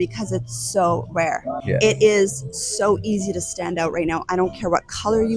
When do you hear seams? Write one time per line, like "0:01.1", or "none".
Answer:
0:01.6